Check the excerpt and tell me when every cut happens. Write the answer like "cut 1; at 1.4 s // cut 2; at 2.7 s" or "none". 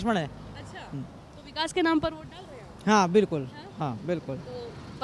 none